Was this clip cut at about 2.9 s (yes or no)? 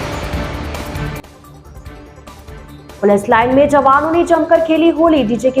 yes